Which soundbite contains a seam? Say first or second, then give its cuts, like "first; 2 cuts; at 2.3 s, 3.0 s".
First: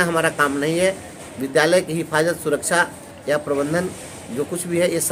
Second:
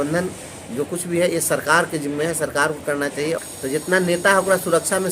second; 1 cut; at 3.4 s